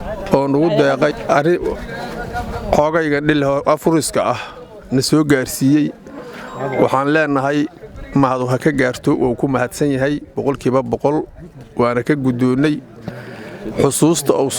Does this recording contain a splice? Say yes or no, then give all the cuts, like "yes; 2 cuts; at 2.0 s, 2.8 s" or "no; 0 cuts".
yes; 1 cut; at 1.1 s